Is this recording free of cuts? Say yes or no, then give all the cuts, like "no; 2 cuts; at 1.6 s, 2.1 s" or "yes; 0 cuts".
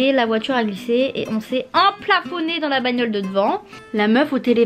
no; 1 cut; at 3.7 s